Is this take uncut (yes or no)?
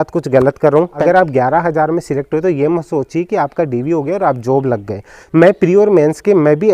no